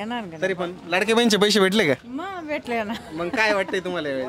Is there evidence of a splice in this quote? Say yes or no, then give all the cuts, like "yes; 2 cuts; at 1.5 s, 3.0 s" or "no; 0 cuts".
no; 0 cuts